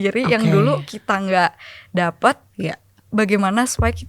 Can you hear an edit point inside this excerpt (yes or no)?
no